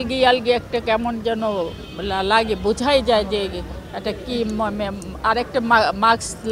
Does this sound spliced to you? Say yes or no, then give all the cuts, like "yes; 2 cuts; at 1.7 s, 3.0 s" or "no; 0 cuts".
no; 0 cuts